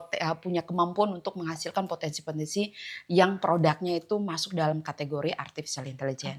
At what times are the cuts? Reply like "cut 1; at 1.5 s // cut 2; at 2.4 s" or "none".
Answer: none